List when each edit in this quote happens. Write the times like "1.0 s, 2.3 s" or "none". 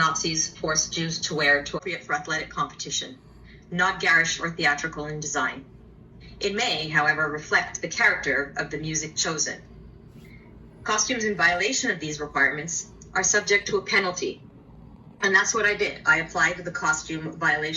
1.8 s